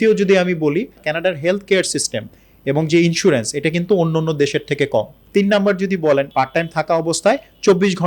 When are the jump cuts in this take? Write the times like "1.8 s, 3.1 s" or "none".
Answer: 1.0 s, 5.2 s, 6.3 s